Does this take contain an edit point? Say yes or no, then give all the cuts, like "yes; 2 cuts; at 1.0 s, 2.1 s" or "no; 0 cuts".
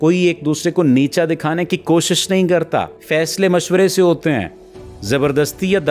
no; 0 cuts